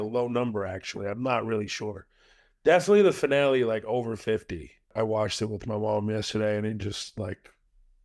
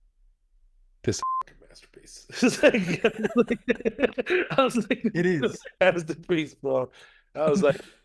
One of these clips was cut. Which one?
first; 1 cut; at 4.9 s

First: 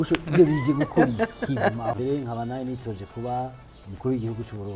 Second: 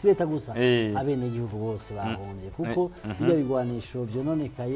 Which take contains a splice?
first; 1 cut; at 1.9 s

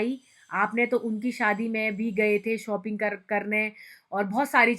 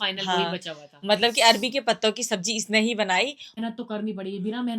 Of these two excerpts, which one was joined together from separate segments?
second; 1 cut; at 3.6 s

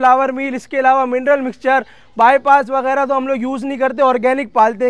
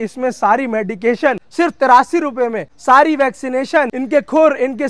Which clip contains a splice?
second; 3 cuts; at 1.4 s, 2.7 s, 4.0 s

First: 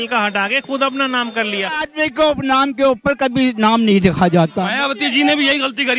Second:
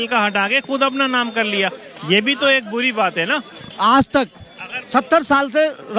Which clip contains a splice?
first; 2 cuts; at 1.9 s, 4.6 s

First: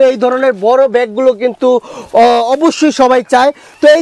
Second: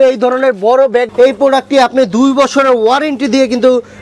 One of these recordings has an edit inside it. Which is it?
second; 1 cut; at 1.1 s

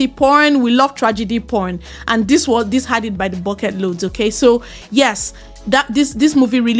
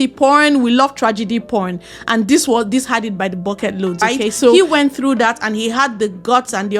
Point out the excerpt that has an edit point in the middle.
second; 1 cut; at 4.5 s

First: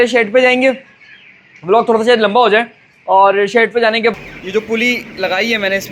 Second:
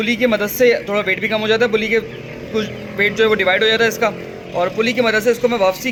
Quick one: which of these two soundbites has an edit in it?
first; 1 cut; at 4.1 s

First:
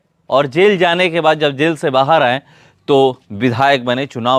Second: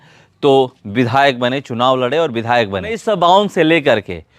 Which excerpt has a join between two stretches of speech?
second; 1 cut; at 3.0 s

